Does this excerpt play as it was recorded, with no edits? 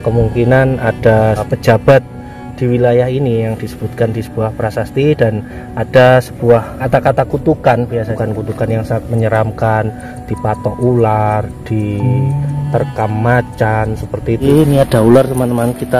no; 4 cuts; at 1.4 s, 6.8 s, 8.1 s, 14.4 s

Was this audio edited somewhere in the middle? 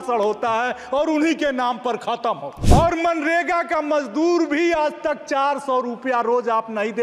yes; 1 cut; at 2.5 s

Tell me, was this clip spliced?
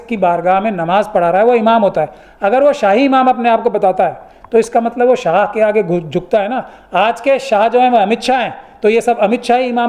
no; 0 cuts

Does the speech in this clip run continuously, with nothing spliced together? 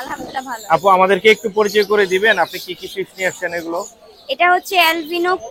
yes; 0 cuts

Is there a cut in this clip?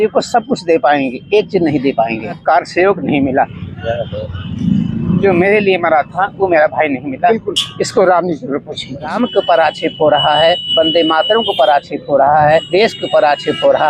yes; 4 cuts; at 2.4 s, 9.1 s, 10.6 s, 12.7 s

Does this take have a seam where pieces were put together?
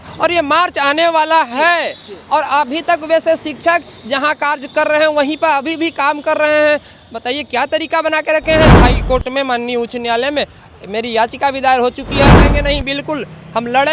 yes; 2 cuts; at 8.8 s, 12.4 s

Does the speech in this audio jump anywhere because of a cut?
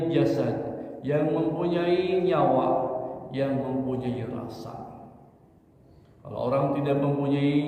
no; 0 cuts

